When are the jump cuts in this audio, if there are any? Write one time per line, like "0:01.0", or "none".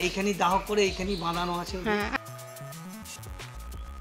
none